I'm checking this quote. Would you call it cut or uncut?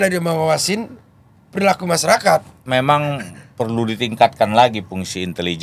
cut